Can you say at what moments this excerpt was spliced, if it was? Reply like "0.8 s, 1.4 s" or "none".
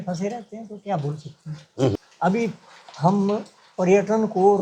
1.9 s